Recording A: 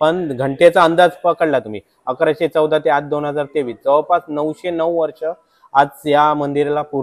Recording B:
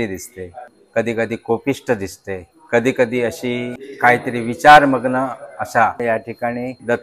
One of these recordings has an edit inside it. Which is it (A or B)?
B